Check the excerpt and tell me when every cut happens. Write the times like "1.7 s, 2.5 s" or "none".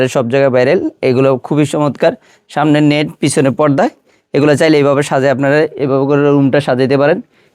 none